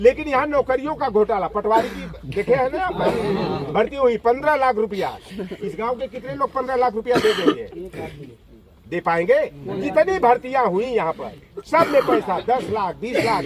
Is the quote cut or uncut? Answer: uncut